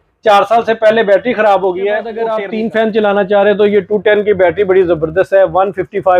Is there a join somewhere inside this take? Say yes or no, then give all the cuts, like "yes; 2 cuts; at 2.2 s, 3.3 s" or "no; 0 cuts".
yes; 1 cut; at 2.3 s